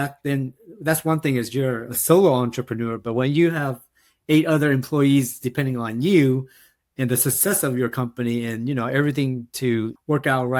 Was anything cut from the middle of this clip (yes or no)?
no